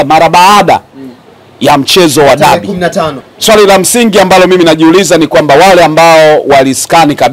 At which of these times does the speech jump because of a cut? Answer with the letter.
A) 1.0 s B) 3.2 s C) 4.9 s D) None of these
B